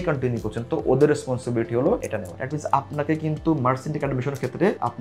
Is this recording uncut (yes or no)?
no